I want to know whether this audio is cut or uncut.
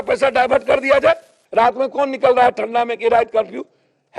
cut